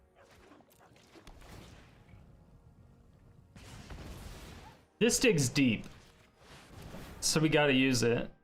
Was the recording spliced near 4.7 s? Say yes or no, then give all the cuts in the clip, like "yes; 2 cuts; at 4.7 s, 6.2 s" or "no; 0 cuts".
yes; 1 cut; at 4.7 s